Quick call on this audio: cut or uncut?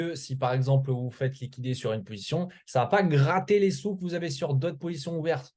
uncut